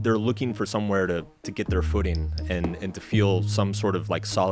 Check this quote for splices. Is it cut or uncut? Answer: uncut